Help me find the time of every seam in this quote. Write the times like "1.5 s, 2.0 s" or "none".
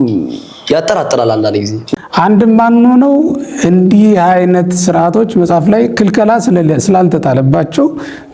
1.8 s